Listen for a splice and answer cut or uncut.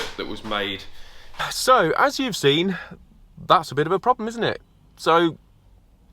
cut